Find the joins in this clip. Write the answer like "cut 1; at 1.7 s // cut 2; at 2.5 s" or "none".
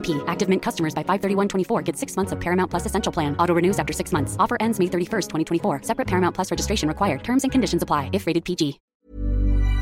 cut 1; at 8.9 s